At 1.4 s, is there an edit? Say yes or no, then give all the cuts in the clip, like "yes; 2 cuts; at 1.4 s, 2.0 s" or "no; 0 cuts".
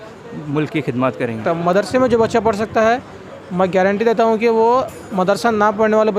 yes; 1 cut; at 1.4 s